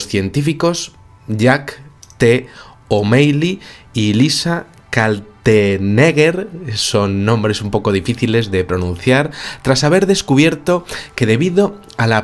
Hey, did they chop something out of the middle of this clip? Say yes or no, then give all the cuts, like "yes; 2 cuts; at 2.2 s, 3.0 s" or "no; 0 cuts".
yes; 1 cut; at 6.7 s